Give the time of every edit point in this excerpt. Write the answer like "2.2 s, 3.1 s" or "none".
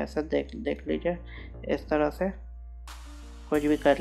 none

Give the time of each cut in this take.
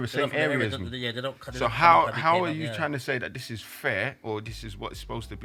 none

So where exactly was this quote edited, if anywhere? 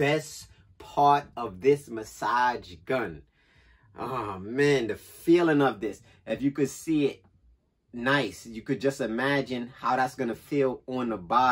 none

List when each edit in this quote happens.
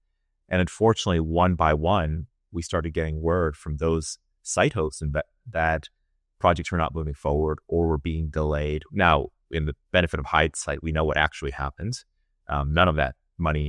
none

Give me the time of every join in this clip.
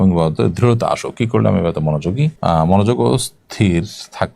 2.4 s

